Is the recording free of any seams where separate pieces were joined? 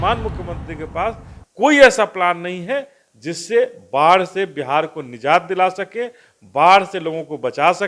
yes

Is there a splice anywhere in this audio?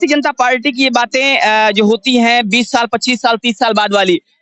no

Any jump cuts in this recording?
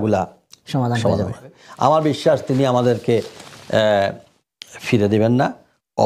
yes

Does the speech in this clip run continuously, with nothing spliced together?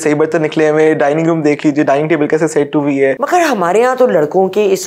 no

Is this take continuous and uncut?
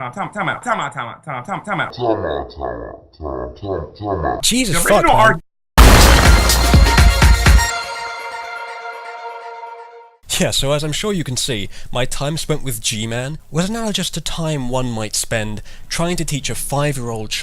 no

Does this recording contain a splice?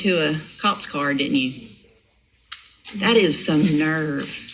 no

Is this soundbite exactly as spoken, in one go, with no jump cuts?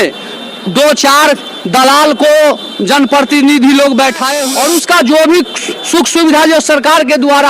no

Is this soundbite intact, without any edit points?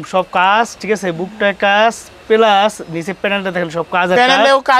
yes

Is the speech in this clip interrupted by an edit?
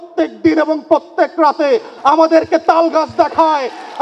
no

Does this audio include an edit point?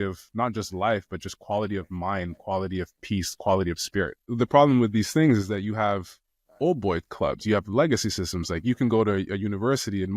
yes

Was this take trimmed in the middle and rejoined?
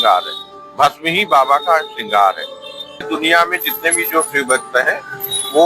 yes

